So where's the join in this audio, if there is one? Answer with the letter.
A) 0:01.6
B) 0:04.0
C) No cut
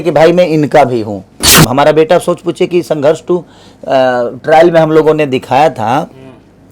A